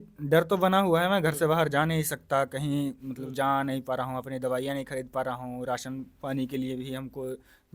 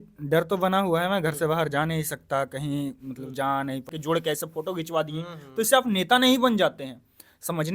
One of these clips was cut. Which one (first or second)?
second